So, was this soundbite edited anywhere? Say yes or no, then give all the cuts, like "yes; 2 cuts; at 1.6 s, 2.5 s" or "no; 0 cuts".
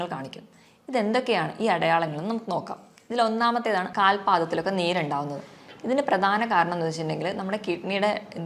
yes; 1 cut; at 3.9 s